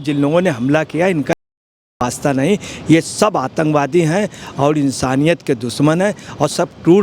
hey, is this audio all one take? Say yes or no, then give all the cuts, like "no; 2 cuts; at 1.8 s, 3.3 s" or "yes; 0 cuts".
yes; 0 cuts